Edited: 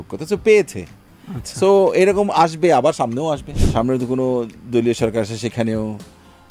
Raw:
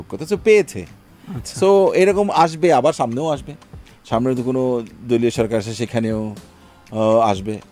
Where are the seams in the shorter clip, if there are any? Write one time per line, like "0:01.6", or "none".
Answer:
0:03.5

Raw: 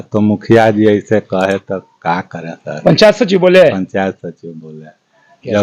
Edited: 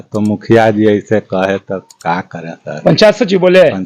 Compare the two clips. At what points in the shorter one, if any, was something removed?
none

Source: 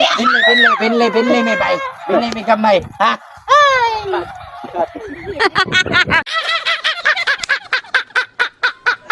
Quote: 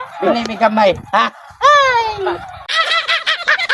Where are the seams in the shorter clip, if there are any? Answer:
0:02.7

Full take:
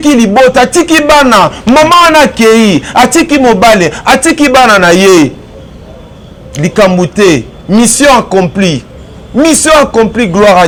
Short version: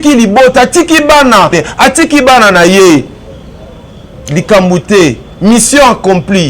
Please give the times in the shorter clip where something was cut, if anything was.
0:01.6

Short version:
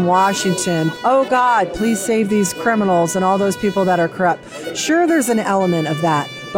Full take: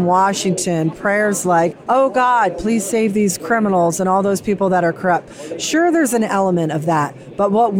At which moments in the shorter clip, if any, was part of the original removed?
0:01.0

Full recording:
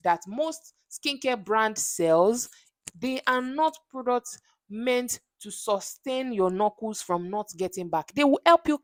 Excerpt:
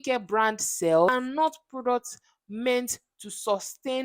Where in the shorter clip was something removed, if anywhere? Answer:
0:01.1

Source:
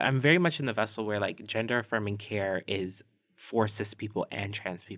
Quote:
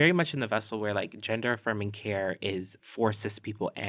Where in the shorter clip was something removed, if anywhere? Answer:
0:02.8

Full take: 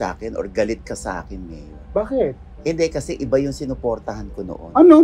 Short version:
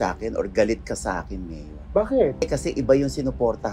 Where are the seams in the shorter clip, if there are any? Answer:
0:02.5

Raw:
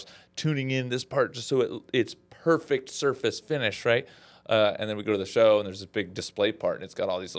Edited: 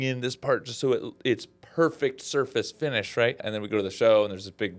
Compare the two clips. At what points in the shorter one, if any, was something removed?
0:03.5

